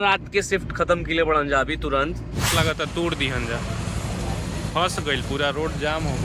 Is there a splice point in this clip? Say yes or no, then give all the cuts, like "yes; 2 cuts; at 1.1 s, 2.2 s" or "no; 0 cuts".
yes; 1 cut; at 2.5 s